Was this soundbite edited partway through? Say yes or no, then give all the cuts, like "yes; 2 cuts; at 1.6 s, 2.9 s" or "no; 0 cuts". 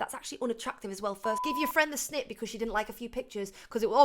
yes; 1 cut; at 1.4 s